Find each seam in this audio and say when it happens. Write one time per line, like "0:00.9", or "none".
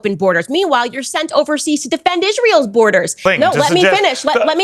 0:03.2